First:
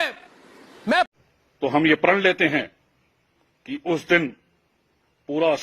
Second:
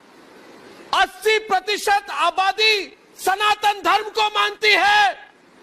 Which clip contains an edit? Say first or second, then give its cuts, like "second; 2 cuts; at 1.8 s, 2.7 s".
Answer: first; 1 cut; at 1.1 s